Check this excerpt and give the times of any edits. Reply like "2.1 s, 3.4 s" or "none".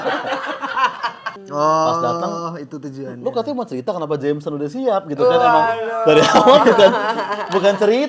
1.3 s